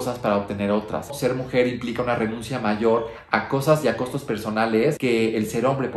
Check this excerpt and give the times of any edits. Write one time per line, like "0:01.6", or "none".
0:01.1
0:05.0